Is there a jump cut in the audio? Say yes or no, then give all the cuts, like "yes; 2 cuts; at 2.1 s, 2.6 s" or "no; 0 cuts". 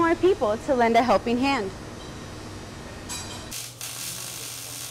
no; 0 cuts